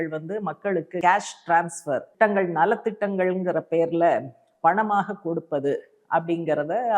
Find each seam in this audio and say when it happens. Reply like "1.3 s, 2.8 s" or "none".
1.0 s, 2.1 s